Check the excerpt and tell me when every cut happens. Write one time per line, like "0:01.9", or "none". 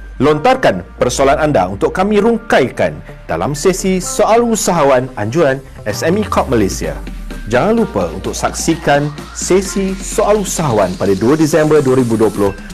none